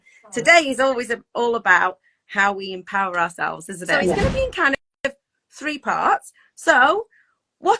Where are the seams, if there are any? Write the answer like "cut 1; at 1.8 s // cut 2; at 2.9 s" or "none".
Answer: cut 1; at 4.2 s